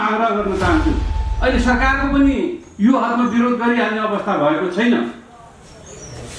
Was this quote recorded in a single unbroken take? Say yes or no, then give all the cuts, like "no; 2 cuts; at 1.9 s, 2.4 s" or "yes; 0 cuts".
no; 1 cut; at 1.1 s